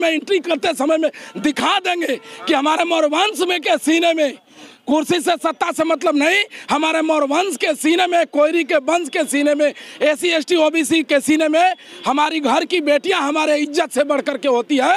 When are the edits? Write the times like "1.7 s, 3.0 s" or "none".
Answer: none